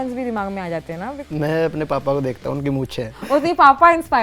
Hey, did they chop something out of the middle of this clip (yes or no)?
yes